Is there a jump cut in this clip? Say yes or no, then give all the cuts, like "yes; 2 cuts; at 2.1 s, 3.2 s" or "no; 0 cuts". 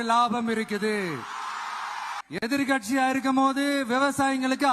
yes; 1 cut; at 2.2 s